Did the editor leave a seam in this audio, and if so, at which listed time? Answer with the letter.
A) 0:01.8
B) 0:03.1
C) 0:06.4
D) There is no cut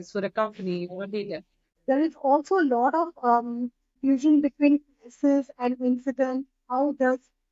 A